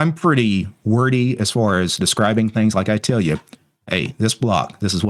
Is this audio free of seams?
yes; 0 cuts

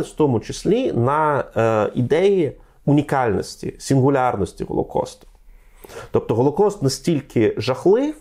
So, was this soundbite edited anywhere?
no; 0 cuts

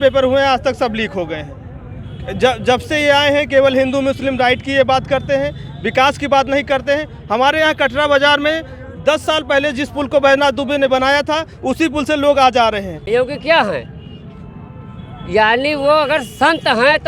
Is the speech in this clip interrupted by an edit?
yes; 1 cut; at 13.0 s

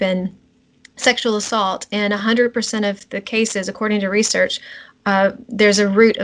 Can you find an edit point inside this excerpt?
no; 0 cuts

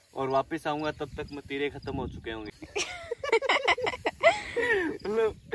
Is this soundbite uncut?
no; 1 cut; at 2.6 s

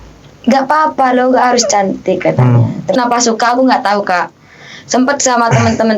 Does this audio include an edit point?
yes; 1 cut; at 3.0 s

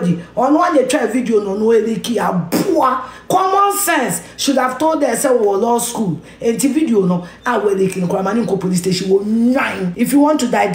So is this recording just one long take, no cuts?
no; 1 cut; at 9.8 s

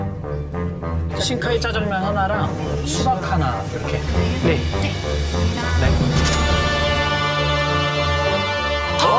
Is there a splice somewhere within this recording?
no; 0 cuts

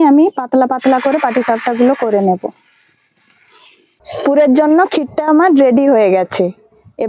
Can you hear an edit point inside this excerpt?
yes; 1 cut; at 4.0 s

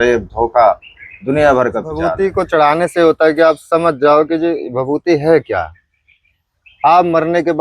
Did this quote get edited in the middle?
yes; 1 cut; at 2.1 s

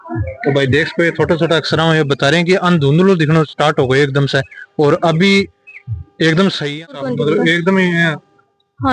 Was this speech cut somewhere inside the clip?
yes; 1 cut; at 7.0 s

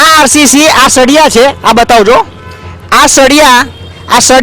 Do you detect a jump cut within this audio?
no; 0 cuts

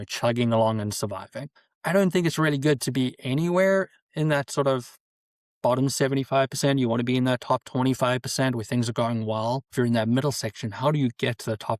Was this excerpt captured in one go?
no; 1 cut; at 9.7 s

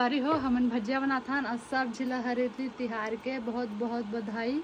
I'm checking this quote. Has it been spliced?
no; 0 cuts

